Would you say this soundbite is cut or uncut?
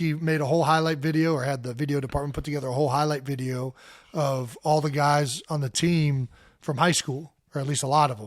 uncut